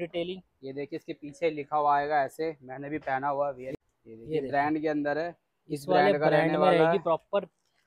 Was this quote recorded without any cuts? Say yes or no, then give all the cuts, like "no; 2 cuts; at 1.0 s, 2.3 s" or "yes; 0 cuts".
no; 1 cut; at 3.7 s